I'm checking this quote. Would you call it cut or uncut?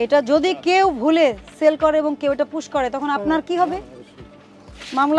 uncut